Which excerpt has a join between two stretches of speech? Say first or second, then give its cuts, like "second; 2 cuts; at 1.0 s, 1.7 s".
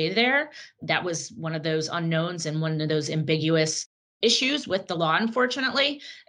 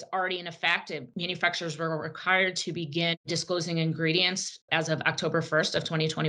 second; 1 cut; at 1.1 s